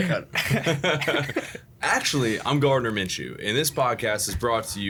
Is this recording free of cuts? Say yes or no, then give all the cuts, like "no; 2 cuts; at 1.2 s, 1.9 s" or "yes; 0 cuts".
yes; 0 cuts